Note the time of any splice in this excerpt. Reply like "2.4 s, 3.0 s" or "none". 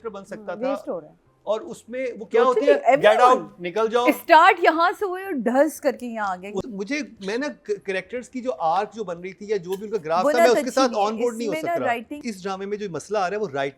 6.7 s, 12.2 s